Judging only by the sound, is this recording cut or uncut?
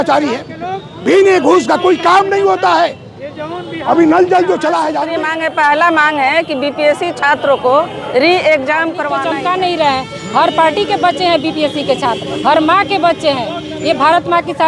cut